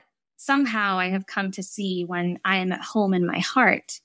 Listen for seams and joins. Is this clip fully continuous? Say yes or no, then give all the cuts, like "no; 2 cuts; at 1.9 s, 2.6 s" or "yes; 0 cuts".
yes; 0 cuts